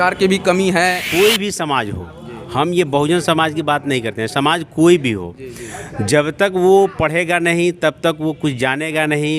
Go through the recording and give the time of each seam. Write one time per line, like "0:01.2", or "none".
0:01.0